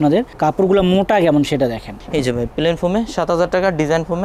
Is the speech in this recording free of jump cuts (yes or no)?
yes